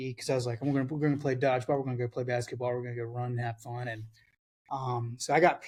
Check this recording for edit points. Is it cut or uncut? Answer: uncut